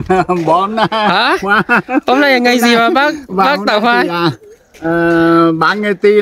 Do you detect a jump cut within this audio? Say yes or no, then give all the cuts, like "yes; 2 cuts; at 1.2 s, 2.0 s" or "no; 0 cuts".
no; 0 cuts